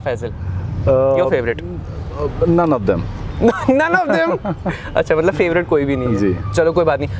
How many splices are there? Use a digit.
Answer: 0